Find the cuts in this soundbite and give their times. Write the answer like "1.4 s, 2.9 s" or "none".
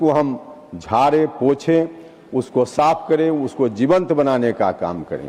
none